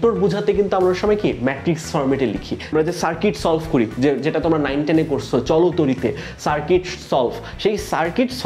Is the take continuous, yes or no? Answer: no